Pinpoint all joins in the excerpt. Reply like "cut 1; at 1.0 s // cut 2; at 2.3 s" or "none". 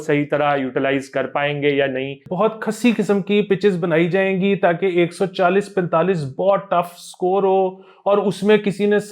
cut 1; at 2.3 s